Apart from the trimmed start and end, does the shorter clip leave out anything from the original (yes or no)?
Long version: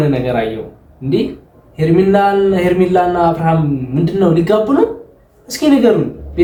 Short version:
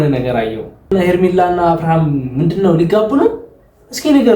yes